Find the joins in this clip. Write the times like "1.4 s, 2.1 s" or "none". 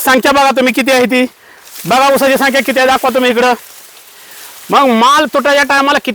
none